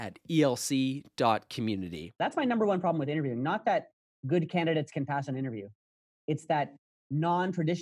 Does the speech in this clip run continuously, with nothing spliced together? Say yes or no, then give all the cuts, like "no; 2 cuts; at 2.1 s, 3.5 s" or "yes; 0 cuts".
no; 1 cut; at 2.1 s